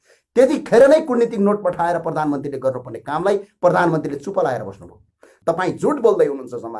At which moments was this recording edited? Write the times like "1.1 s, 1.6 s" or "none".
5.3 s